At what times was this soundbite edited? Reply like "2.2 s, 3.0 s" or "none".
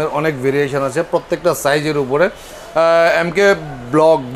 none